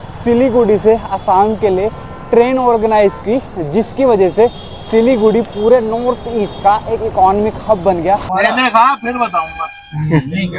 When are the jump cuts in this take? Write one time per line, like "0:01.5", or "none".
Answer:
0:08.3